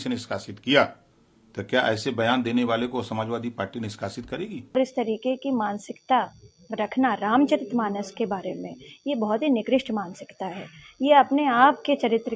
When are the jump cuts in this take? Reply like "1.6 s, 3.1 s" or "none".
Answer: 4.8 s